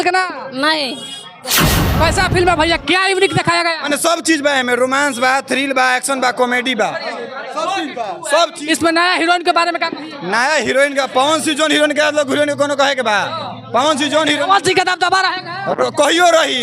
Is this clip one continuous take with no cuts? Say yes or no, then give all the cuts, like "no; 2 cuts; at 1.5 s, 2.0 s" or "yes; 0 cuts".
no; 1 cut; at 1.7 s